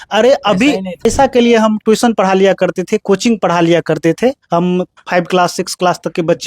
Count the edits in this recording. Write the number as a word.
one